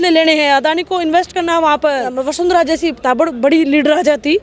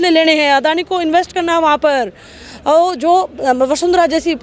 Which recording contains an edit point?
first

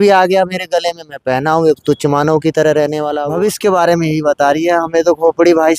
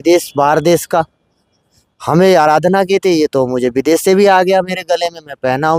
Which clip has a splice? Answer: first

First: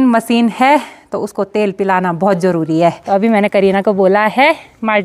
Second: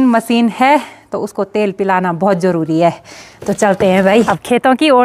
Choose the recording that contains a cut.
first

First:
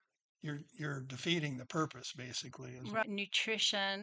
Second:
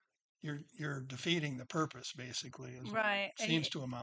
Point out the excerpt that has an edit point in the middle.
first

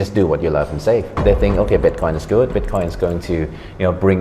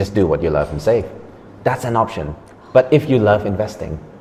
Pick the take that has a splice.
first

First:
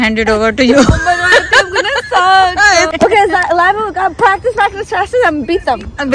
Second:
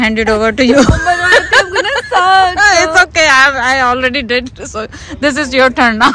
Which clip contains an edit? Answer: first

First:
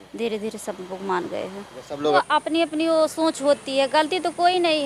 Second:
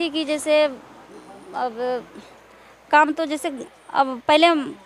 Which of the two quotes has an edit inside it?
first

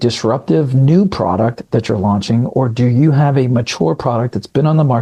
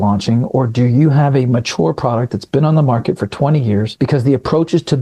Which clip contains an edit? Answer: second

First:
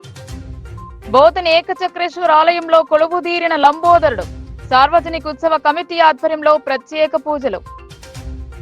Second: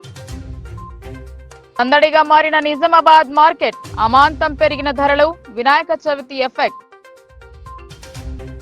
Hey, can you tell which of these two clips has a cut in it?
second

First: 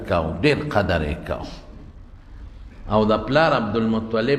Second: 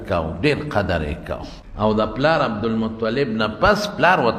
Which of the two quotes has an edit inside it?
second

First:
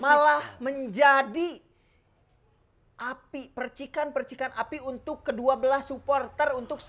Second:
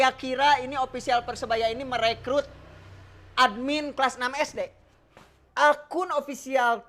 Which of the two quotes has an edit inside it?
second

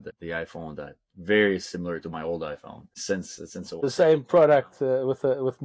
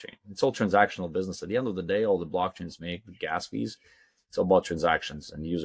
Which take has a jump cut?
first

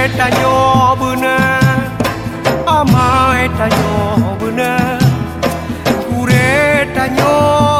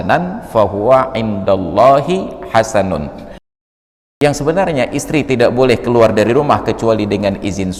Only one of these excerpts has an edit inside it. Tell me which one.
second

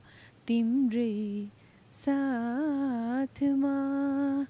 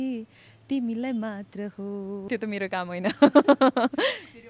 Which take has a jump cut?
second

